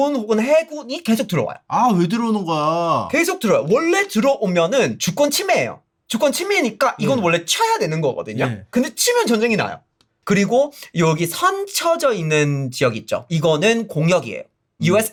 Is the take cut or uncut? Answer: uncut